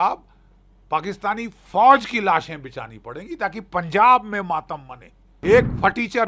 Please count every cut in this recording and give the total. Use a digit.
1